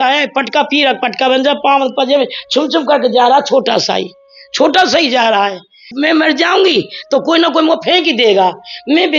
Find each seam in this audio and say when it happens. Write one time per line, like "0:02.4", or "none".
0:05.8

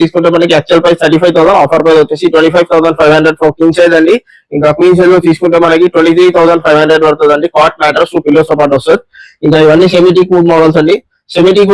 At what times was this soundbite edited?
none

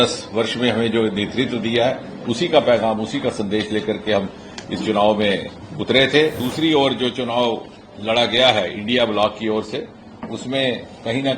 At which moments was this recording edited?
0:06.4

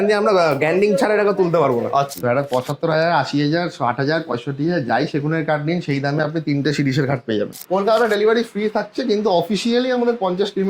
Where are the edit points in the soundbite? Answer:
0:02.1
0:07.6

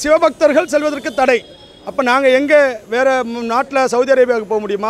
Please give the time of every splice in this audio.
none

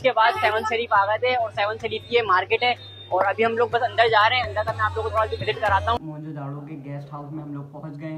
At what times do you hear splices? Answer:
0:06.0

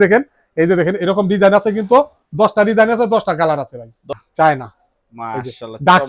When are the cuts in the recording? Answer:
0:04.1

